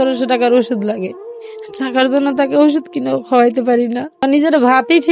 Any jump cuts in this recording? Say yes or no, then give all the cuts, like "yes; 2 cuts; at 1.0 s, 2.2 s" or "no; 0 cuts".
yes; 1 cut; at 4.2 s